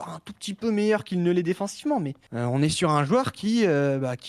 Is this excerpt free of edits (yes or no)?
no